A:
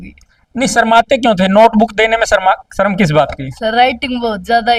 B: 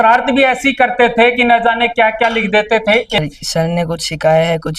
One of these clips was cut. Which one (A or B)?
B